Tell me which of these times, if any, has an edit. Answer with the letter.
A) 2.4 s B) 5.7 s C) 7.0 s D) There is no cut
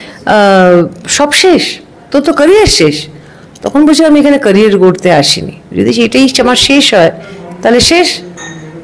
D